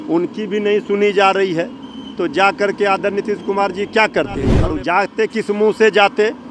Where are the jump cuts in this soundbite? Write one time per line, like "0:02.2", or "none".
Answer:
0:04.6